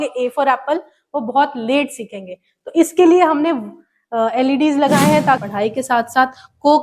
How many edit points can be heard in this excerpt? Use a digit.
1